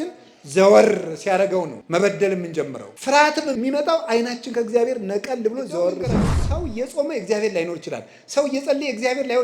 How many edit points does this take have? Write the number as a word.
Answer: four